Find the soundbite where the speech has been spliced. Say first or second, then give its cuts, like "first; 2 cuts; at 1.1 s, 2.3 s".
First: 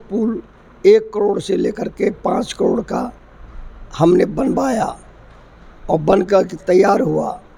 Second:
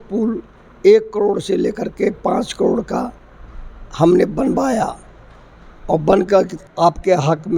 second; 1 cut; at 6.6 s